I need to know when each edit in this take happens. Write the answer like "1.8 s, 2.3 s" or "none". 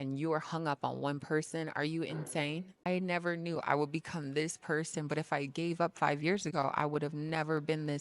2.9 s